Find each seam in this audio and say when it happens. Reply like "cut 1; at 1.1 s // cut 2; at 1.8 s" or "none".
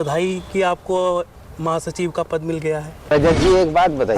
cut 1; at 3.1 s